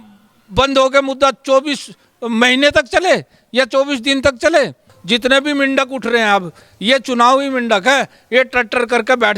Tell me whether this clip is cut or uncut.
cut